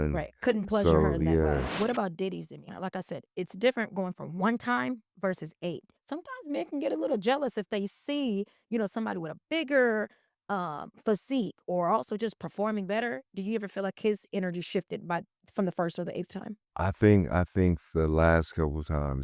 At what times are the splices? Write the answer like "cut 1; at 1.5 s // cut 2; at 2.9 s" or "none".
cut 1; at 1.7 s // cut 2; at 5.9 s

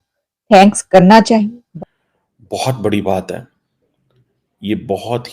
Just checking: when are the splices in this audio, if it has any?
cut 1; at 1.6 s

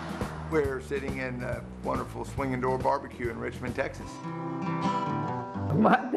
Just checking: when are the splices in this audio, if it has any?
cut 1; at 4.3 s

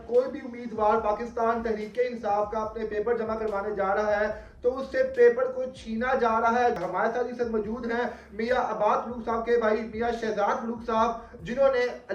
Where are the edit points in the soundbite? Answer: cut 1; at 6.8 s

